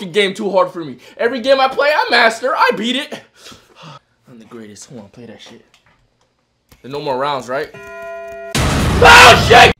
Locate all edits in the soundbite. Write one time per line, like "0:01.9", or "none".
0:04.1